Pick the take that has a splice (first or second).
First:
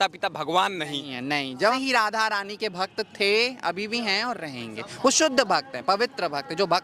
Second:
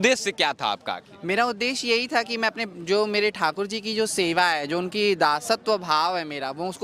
first